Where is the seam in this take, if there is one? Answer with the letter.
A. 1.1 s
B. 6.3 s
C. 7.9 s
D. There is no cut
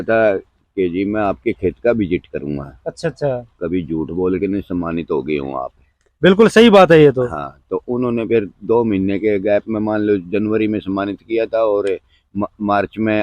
D